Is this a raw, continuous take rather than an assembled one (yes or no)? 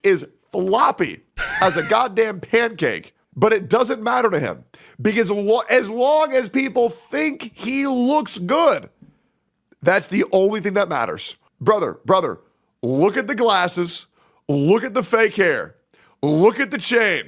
yes